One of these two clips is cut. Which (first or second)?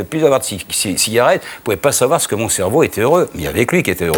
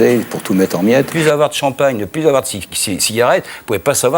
second